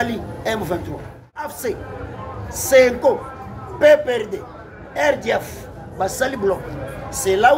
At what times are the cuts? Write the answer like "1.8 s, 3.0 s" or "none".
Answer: 1.5 s